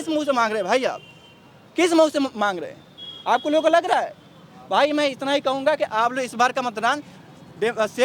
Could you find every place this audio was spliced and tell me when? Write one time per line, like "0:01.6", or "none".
none